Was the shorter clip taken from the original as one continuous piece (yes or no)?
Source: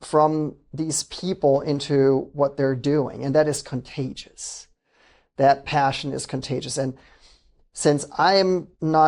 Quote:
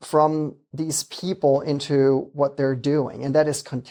yes